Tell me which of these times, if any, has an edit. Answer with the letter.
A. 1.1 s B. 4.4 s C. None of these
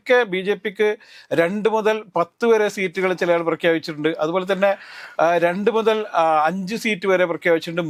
C